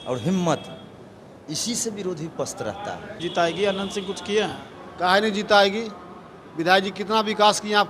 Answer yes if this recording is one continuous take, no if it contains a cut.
no